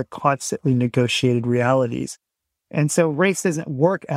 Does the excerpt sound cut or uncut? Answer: cut